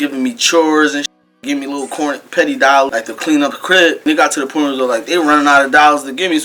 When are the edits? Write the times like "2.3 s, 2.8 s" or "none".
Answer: 2.9 s, 4.0 s